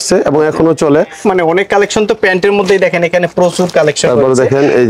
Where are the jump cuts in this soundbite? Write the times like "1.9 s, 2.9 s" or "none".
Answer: 1.2 s